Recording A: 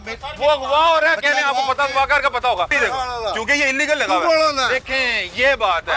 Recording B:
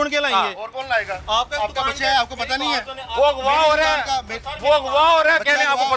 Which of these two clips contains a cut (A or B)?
A